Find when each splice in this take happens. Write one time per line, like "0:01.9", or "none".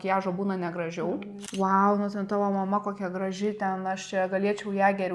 0:01.4